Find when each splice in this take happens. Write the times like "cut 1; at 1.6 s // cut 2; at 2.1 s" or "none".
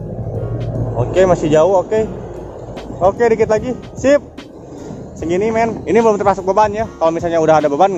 none